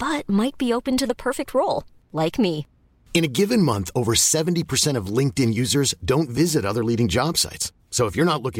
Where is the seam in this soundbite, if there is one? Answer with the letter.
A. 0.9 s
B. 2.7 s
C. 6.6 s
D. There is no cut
D